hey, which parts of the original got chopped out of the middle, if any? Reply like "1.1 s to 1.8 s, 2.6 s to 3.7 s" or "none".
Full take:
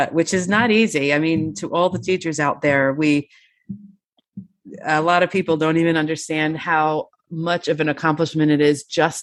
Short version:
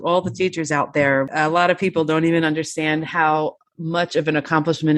3.0 s to 4.8 s